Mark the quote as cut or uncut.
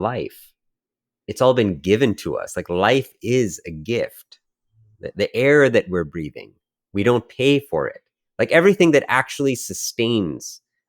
cut